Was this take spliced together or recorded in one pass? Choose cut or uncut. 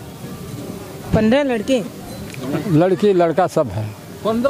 uncut